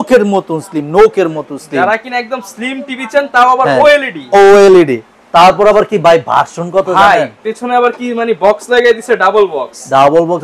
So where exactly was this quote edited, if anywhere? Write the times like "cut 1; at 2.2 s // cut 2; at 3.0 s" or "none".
none